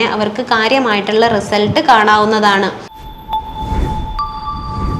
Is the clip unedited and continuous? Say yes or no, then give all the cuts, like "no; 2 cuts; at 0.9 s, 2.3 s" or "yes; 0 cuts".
no; 1 cut; at 2.9 s